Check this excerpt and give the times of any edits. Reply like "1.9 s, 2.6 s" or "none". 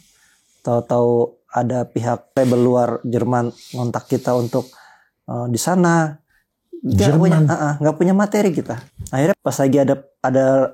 2.3 s, 9.0 s